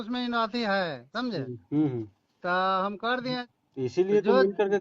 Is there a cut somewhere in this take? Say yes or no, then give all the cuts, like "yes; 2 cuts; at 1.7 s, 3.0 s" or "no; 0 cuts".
yes; 1 cut; at 3.4 s